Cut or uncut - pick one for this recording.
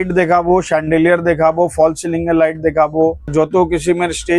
cut